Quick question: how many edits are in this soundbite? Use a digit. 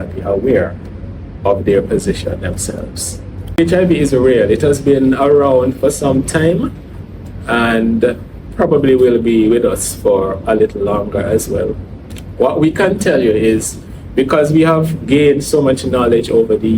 1